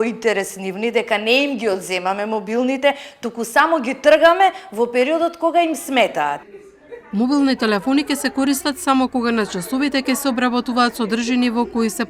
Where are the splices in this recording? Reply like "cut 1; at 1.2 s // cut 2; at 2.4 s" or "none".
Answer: none